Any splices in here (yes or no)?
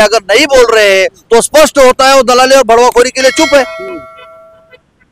no